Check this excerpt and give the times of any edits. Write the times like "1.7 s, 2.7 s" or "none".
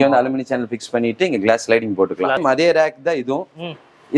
2.4 s